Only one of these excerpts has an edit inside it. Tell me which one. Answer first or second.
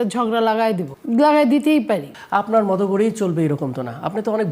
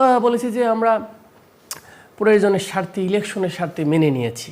first